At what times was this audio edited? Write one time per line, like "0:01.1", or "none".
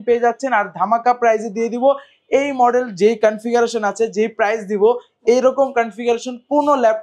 none